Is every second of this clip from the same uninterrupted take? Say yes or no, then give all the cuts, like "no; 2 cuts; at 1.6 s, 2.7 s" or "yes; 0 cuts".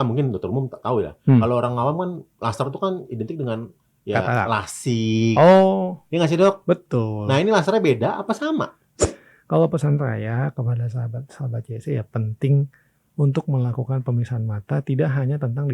no; 1 cut; at 9.1 s